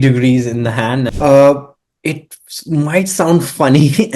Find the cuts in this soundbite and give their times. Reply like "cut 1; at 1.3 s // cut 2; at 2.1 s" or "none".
cut 1; at 1.1 s